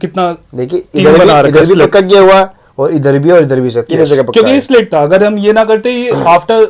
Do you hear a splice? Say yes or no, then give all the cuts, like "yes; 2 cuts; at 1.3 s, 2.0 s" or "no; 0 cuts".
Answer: no; 0 cuts